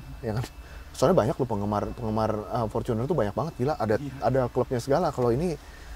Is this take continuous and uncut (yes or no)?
yes